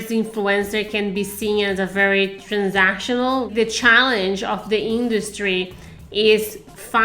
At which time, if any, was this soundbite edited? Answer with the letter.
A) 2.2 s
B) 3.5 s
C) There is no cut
B